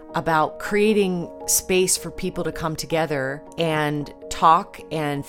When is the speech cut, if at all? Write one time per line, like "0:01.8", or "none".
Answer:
0:01.4
0:03.4
0:04.2